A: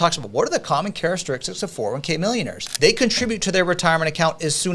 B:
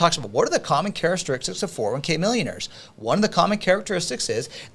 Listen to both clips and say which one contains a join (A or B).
A